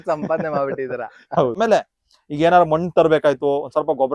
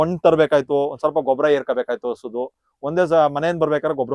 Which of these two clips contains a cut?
first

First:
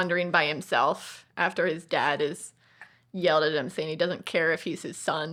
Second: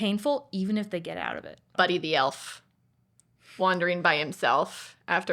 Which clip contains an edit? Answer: second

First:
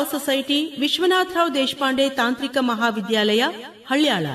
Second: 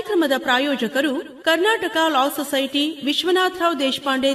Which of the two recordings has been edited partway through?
second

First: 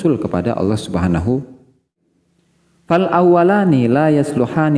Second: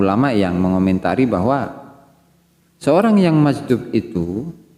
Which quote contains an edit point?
first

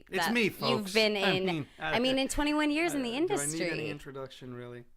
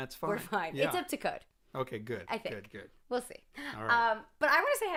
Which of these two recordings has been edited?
first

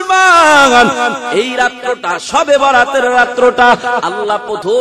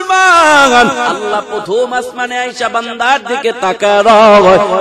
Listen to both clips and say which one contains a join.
second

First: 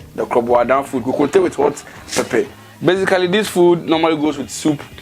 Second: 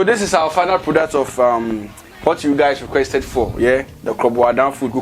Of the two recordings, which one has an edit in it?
first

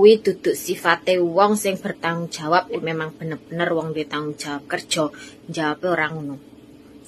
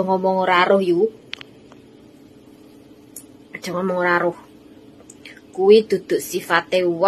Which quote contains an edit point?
first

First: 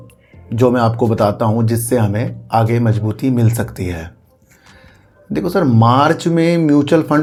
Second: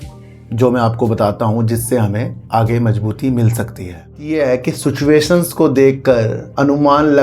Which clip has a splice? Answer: second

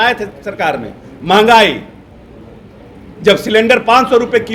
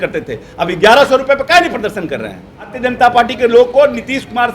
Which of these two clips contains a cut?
second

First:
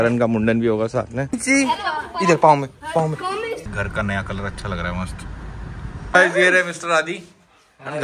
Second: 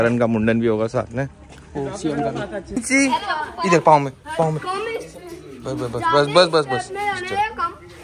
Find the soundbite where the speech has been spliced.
first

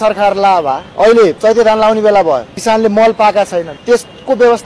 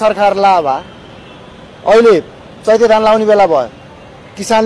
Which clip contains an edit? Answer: first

